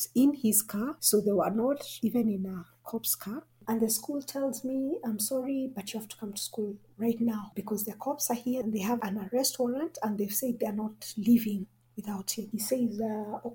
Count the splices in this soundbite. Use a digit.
5